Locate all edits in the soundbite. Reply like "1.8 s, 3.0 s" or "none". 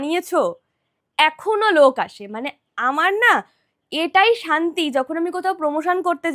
none